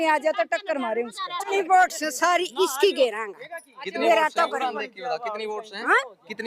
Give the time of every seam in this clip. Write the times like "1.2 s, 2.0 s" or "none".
1.5 s